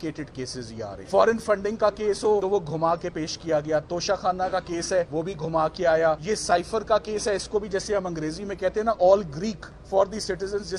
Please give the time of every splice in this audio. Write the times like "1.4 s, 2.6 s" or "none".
1.0 s, 2.4 s, 5.1 s, 6.2 s, 9.7 s